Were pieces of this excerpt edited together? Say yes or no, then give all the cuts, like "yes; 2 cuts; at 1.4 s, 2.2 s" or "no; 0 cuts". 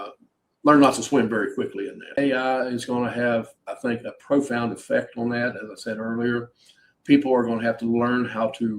yes; 1 cut; at 2.2 s